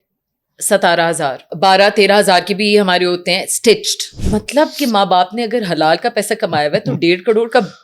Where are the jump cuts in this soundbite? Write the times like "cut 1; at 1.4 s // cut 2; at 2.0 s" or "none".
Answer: cut 1; at 1.5 s // cut 2; at 4.1 s